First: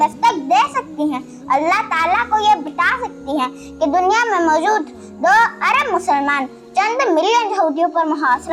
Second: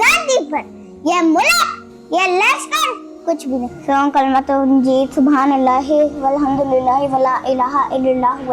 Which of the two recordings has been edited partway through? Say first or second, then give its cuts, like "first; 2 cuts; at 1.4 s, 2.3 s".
second; 1 cut; at 3.7 s